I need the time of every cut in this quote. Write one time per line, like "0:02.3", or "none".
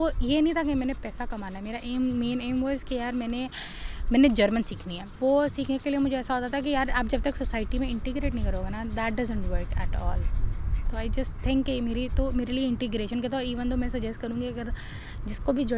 none

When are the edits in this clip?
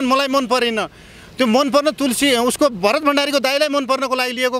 none

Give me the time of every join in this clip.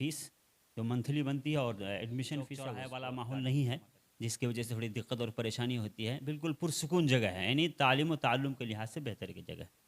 0:02.8

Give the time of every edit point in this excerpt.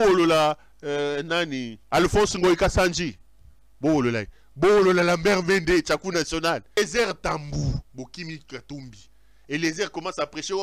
0:06.8

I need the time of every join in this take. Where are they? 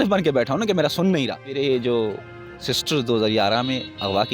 0:01.4

